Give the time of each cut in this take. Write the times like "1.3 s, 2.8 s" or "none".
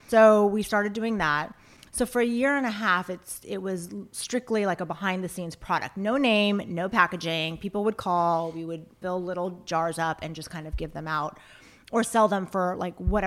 8.9 s, 9.6 s